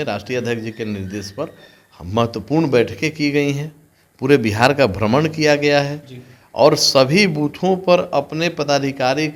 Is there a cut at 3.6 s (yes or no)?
no